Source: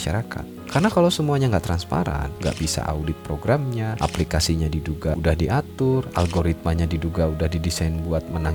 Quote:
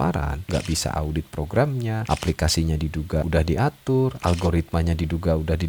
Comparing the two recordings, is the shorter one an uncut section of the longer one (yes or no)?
yes